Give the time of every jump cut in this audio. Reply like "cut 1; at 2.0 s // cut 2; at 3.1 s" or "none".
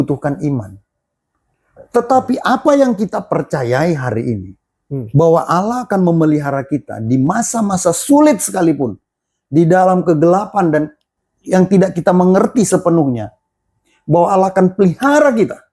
cut 1; at 11.1 s